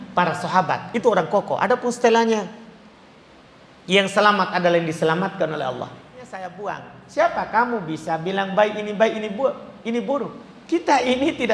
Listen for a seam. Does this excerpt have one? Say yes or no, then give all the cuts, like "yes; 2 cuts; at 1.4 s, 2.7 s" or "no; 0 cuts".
yes; 1 cut; at 6.5 s